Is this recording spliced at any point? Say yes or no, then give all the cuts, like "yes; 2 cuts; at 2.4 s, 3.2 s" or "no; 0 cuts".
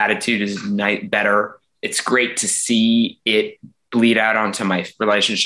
yes; 1 cut; at 1.7 s